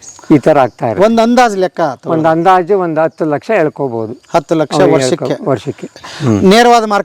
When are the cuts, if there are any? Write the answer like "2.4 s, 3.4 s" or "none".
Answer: 5.9 s